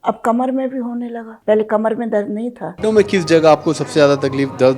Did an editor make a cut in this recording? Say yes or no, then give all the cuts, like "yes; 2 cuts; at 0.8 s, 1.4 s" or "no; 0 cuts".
yes; 2 cuts; at 1.2 s, 2.7 s